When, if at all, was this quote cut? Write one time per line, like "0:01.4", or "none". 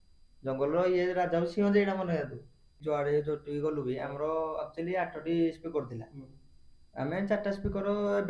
0:02.8

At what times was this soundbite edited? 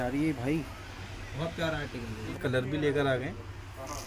0:02.3

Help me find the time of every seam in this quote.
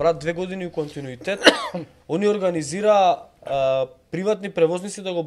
none

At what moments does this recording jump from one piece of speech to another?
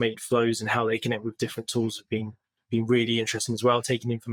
none

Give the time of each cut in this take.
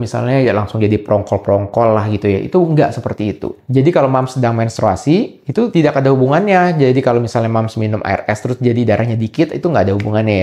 0:03.5

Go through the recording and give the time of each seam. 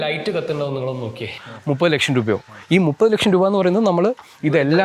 0:01.5

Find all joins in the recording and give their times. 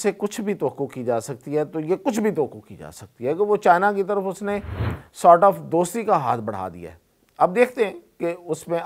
none

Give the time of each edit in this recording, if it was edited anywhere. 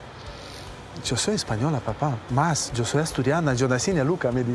none

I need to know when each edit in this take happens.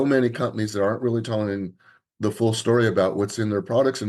none

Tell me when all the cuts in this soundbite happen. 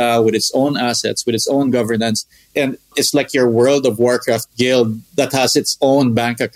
0:02.9

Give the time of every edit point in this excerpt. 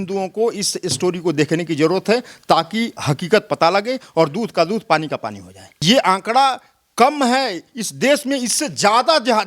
0:05.7

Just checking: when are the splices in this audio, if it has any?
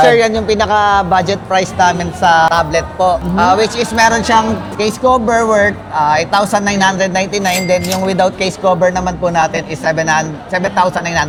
none

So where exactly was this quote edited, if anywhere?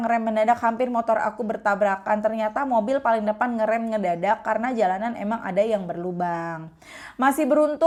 none

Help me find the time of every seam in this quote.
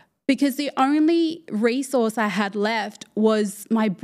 none

